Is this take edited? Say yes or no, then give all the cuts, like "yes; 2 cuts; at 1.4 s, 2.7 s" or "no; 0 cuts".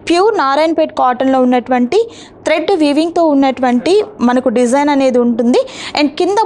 no; 0 cuts